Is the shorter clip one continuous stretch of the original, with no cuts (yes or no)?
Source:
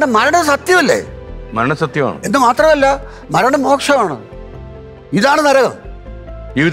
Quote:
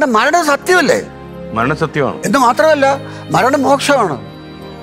yes